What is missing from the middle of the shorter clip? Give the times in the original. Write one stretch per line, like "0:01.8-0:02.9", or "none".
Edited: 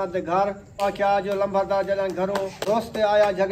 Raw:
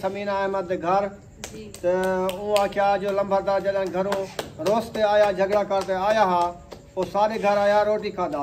0:01.4-0:02.6
0:04.3-0:04.6